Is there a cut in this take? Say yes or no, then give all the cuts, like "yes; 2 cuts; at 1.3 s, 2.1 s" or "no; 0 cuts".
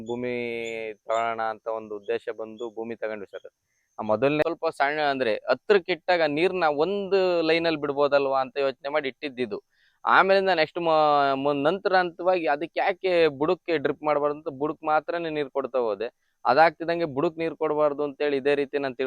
yes; 1 cut; at 4.4 s